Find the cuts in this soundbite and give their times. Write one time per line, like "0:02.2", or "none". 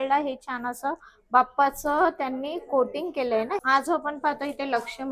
0:03.6